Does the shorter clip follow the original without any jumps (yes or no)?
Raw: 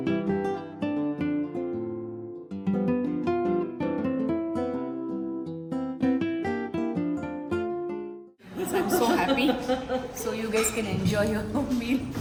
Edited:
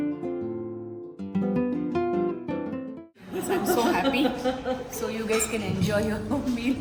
no